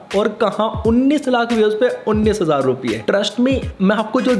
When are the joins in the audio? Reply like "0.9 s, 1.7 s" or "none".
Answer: 3.0 s